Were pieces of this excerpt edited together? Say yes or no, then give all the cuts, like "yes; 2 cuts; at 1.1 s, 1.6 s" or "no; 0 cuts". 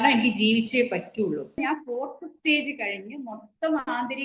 yes; 1 cut; at 1.6 s